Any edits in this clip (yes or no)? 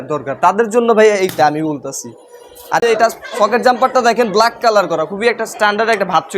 yes